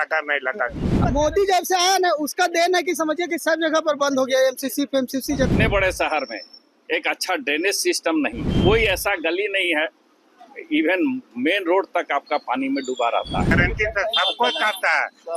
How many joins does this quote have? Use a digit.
4